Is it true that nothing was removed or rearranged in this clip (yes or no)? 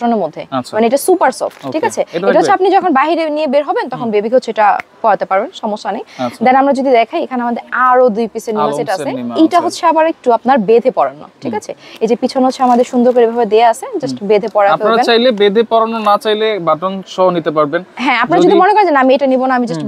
yes